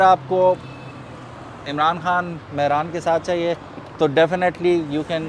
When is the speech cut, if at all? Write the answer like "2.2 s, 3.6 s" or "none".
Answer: none